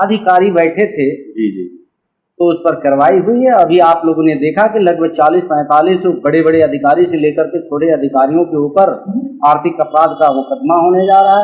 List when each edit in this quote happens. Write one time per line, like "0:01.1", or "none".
none